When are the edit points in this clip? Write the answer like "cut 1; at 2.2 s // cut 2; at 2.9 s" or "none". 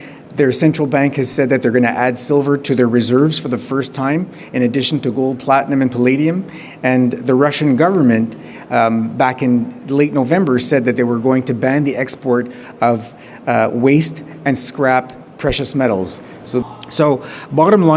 cut 1; at 16.6 s